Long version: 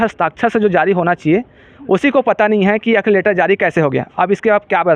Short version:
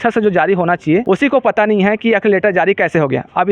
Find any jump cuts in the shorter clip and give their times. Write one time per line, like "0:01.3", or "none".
0:01.0